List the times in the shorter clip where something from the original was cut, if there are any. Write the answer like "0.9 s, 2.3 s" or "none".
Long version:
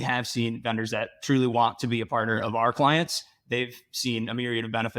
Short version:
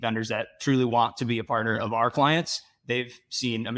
none